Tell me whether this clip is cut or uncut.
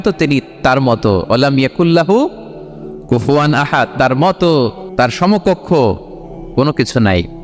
cut